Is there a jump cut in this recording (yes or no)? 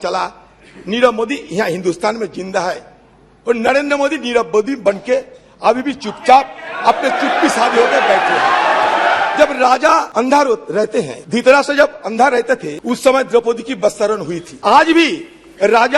yes